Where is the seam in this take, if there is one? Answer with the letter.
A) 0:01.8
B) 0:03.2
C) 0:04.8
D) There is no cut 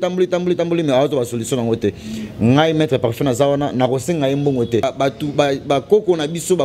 C